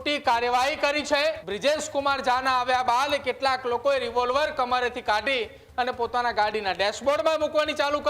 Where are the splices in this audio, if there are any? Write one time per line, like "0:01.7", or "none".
0:01.5

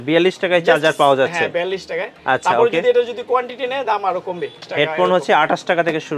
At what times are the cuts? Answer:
0:04.7

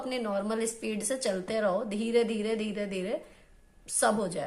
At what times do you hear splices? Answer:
none

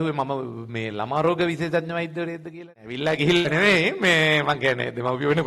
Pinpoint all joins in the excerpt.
0:03.0

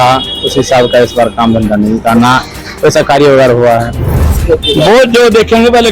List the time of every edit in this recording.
0:04.4

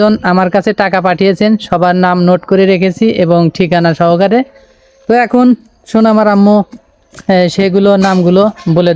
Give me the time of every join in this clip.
none

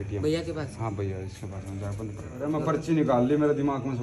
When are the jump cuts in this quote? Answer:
0:02.3

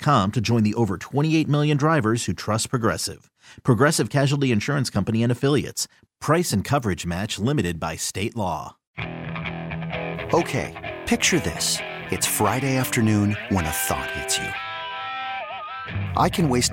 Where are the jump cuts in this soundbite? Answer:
0:08.9

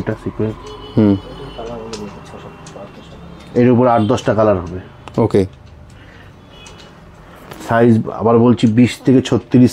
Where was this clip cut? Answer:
none

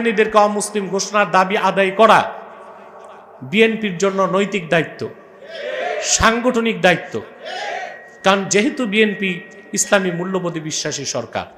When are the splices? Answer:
none

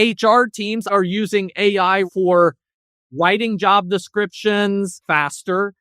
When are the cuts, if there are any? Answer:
0:00.9
0:02.1
0:05.0

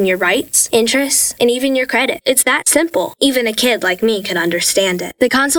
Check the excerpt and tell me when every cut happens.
none

